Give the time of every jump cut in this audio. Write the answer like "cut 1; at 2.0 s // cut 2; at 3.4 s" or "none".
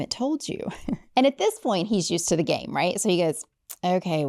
cut 1; at 1.0 s